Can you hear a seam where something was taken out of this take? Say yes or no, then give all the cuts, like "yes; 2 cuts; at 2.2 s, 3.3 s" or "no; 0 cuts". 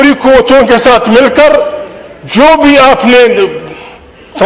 no; 0 cuts